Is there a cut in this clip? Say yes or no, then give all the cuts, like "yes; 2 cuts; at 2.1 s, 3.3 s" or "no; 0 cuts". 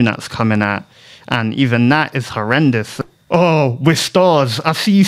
yes; 1 cut; at 2.9 s